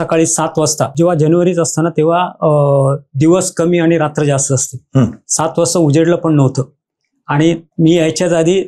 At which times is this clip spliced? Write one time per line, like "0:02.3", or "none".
0:00.9